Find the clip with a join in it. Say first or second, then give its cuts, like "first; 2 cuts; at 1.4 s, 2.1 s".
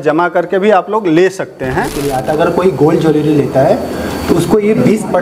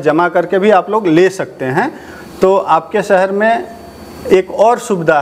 first; 1 cut; at 2.1 s